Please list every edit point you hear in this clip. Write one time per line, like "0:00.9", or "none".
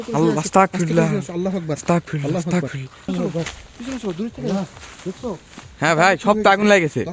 0:03.1